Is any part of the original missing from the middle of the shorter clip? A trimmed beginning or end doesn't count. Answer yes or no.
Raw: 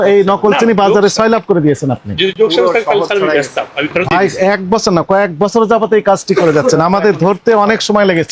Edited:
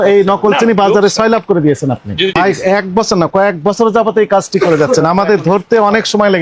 yes